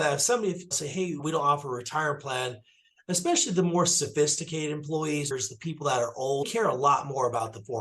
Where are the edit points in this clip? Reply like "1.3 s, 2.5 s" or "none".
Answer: 1.0 s, 5.3 s, 6.5 s